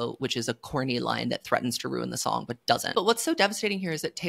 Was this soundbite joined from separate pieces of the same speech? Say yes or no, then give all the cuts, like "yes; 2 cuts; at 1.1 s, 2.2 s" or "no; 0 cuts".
yes; 1 cut; at 2.9 s